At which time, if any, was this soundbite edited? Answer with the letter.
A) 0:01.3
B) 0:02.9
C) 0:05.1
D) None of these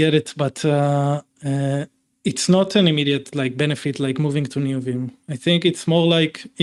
D